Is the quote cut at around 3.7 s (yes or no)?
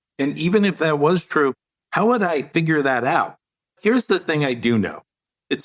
yes